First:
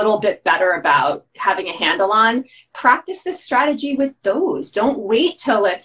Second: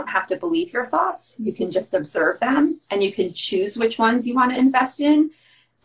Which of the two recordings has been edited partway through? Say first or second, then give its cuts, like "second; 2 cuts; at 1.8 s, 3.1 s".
first; 1 cut; at 1.3 s